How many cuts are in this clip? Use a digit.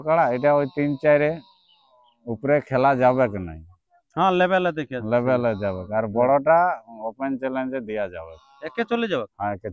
0